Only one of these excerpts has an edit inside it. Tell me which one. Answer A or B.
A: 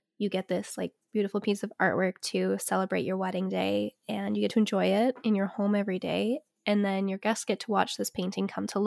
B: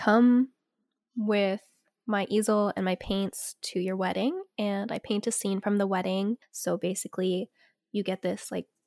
B